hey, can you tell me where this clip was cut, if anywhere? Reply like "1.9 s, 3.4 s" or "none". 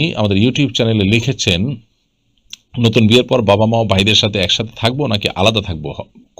none